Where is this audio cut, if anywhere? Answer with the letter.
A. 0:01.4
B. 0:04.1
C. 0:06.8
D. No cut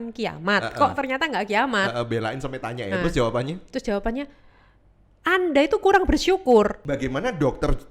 C